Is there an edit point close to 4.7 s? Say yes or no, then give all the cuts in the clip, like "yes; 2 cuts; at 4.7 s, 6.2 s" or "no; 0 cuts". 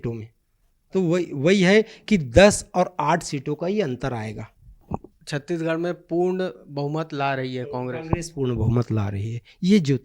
yes; 1 cut; at 4.7 s